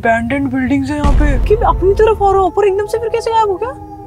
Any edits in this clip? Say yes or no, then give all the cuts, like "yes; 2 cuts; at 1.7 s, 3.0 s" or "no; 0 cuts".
yes; 1 cut; at 1.4 s